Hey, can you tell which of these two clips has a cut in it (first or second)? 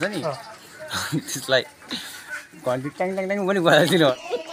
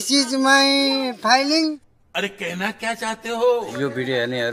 second